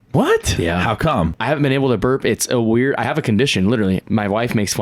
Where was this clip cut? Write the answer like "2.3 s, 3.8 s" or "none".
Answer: 1.4 s, 4.0 s